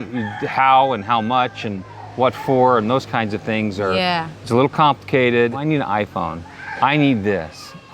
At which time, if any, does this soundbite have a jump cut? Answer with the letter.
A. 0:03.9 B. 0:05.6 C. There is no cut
B